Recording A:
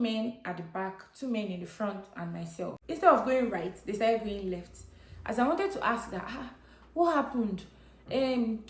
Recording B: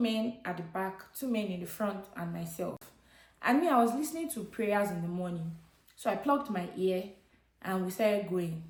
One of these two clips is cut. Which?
A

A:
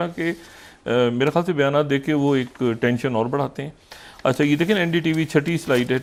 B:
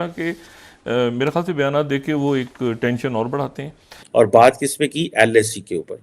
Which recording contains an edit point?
B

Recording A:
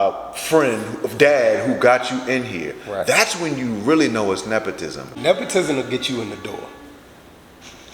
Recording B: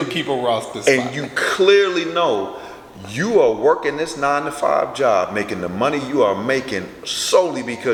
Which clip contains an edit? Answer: A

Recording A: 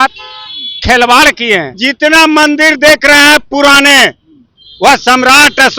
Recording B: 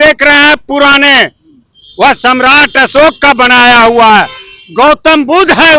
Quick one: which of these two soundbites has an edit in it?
A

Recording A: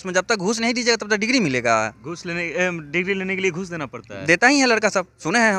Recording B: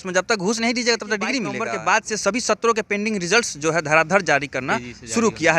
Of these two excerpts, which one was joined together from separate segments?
B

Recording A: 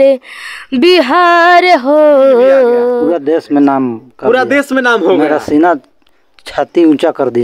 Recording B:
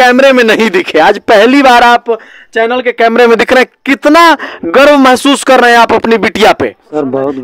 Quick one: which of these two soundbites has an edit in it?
A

